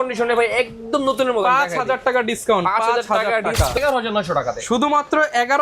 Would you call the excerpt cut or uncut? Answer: cut